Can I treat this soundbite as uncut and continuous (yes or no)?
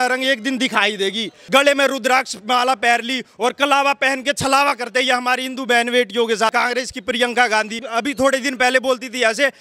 no